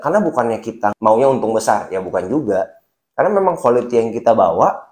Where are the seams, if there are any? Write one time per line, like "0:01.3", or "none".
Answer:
0:01.0